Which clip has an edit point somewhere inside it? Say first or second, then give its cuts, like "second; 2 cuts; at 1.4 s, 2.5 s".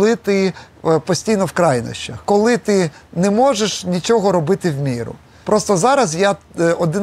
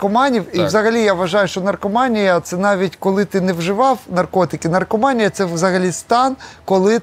first; 2 cuts; at 2.2 s, 5.4 s